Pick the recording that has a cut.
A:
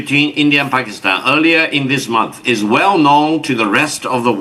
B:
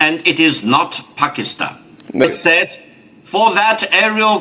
B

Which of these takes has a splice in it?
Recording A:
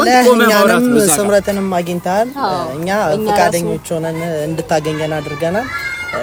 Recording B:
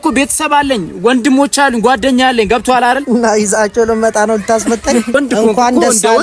B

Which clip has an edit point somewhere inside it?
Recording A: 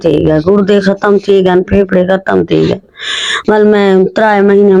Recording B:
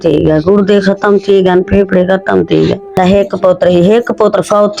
B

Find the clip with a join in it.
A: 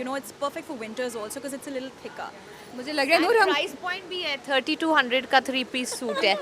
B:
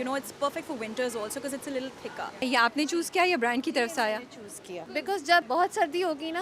B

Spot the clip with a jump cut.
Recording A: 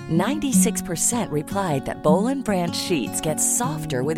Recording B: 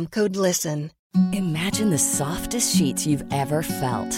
B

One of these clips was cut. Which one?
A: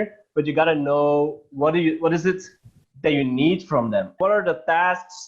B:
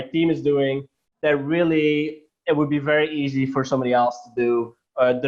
A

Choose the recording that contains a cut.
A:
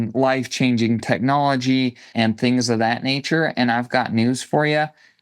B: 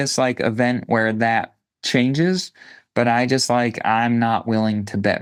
A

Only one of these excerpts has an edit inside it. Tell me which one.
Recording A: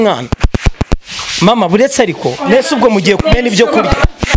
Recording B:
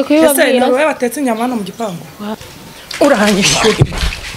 B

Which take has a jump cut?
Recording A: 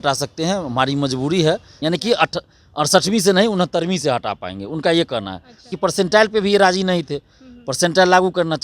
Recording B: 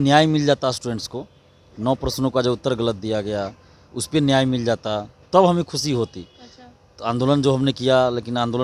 A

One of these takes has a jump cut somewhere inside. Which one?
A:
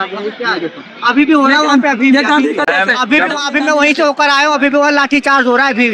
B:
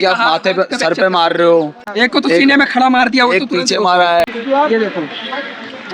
B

